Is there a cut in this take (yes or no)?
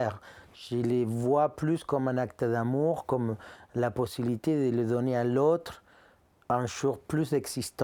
no